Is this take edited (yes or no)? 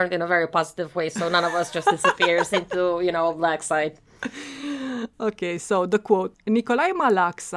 no